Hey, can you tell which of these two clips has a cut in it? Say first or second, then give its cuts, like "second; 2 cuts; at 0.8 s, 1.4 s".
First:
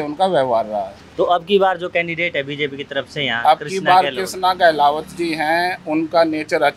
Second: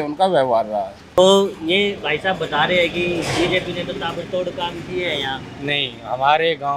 second; 1 cut; at 1.2 s